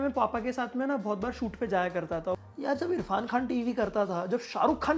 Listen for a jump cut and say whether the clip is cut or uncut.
cut